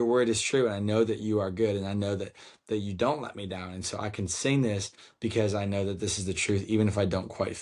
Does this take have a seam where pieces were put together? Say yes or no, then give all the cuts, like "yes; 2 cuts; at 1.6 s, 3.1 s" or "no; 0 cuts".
no; 0 cuts